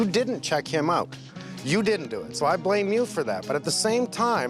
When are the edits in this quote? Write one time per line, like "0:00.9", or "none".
none